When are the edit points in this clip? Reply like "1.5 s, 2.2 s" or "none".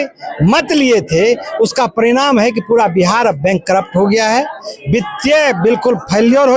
none

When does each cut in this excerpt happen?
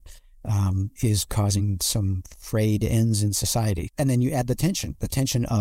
none

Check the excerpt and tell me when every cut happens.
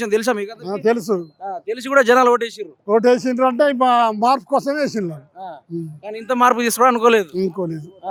none

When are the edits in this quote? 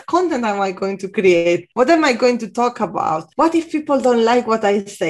1.7 s, 3.2 s

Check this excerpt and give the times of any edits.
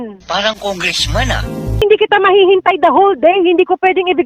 1.8 s

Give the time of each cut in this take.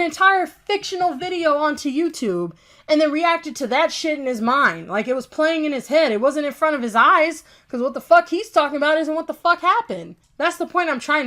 10.2 s

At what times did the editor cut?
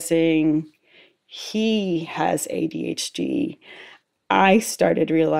none

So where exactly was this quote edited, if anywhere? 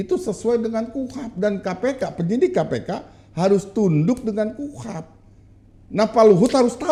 none

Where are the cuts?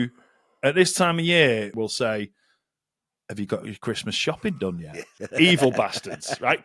1.7 s, 5.2 s

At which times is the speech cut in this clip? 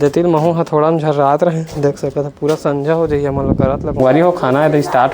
4.0 s

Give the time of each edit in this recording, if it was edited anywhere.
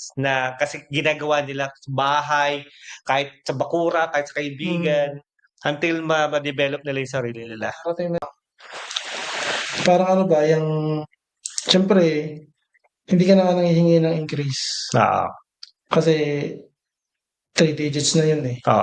8.2 s

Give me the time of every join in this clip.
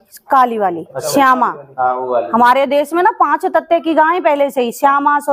none

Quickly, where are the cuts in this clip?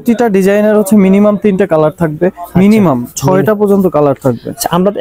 none

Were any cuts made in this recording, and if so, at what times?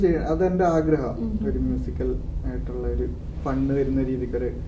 none

